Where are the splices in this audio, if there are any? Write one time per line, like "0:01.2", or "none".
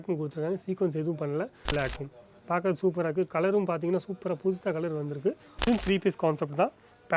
0:01.7
0:05.6